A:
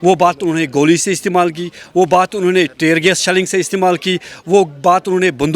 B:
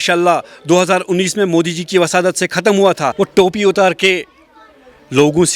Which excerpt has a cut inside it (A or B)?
B